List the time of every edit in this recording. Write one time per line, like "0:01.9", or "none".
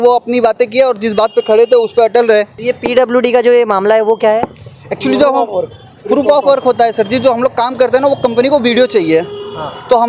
0:02.6